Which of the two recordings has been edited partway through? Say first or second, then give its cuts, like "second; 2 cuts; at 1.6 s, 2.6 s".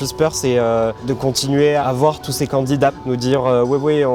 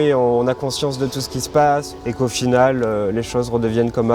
first; 2 cuts; at 1.8 s, 3.0 s